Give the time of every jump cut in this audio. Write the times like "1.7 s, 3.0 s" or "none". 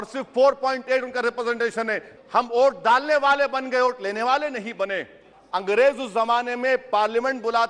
2.1 s, 5.3 s